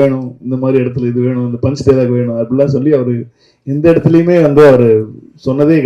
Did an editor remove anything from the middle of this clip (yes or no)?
no